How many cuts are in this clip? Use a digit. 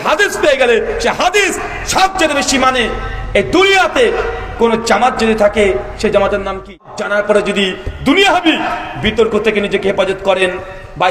1